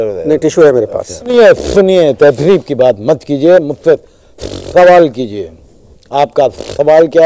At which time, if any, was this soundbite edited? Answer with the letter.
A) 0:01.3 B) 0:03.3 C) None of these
A